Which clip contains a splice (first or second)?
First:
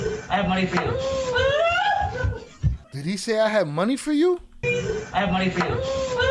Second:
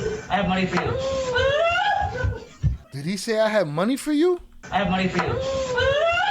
second